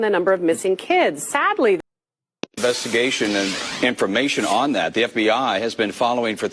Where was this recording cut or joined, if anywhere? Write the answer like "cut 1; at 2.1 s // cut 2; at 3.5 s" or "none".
cut 1; at 1.8 s